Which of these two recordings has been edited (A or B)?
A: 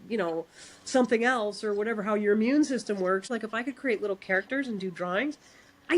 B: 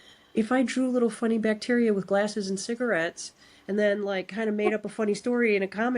A